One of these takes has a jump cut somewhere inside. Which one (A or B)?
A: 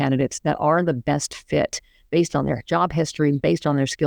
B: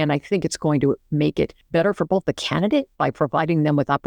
B